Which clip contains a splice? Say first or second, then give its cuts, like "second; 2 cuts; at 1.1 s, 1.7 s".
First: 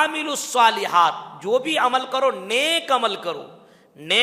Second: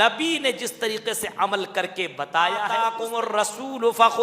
second; 1 cut; at 3.0 s